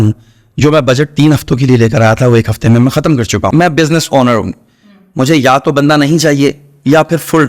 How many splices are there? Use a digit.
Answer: 1